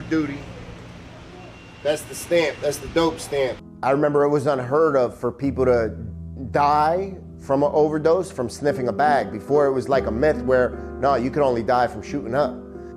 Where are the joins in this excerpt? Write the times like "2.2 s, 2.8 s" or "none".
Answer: 3.6 s

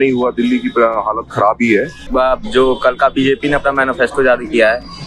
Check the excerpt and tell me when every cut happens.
2.0 s

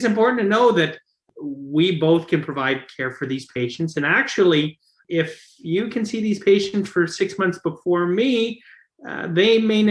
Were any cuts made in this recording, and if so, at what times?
1.3 s, 5.0 s

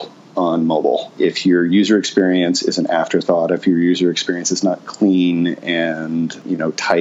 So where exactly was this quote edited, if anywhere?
1.2 s

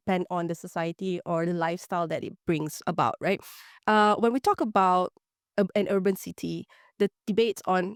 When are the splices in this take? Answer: none

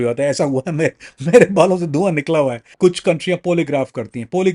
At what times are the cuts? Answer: 2.6 s

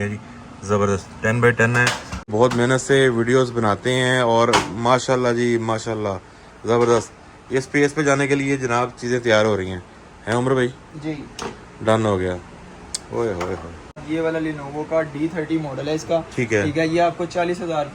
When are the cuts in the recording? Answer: 2.3 s, 14.0 s

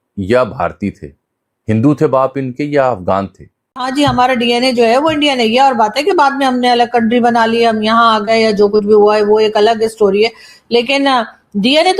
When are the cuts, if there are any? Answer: 3.8 s

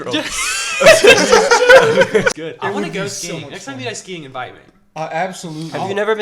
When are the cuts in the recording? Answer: 2.3 s

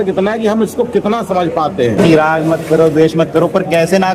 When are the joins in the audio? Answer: 2.0 s

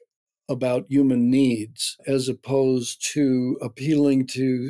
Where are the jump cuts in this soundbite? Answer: 2.0 s

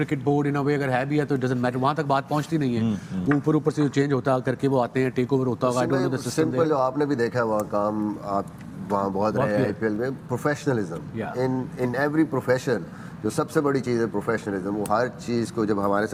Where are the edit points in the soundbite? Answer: none

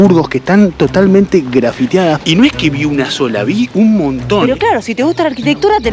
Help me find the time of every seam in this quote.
2.2 s, 4.4 s

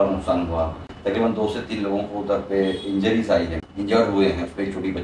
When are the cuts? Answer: 3.6 s

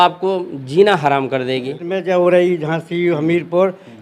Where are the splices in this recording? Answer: 1.9 s

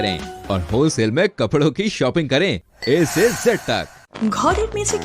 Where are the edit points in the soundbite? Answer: 4.0 s

